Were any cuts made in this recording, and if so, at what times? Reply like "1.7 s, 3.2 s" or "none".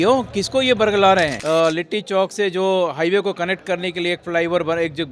1.4 s